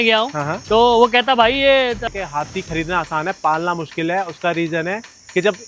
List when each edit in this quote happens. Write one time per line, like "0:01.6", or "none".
0:02.0